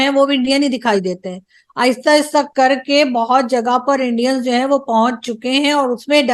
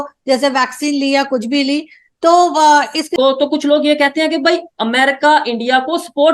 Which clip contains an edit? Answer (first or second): second